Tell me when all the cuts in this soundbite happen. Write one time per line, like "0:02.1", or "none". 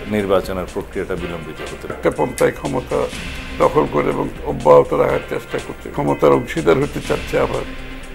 0:01.9
0:05.9